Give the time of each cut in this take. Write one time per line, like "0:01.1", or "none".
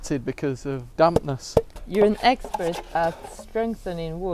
0:00.9
0:01.8